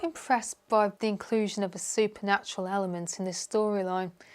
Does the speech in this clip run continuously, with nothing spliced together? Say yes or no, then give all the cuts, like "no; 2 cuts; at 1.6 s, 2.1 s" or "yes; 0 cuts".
no; 1 cut; at 1.0 s